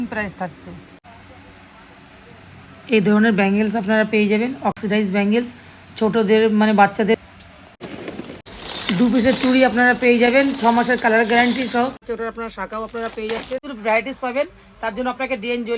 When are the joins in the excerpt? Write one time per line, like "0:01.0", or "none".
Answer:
0:08.4
0:12.0